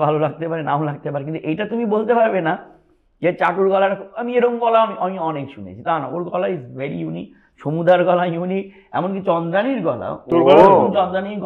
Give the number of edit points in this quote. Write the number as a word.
zero